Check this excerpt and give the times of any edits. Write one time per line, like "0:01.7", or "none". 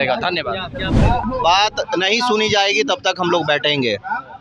0:01.2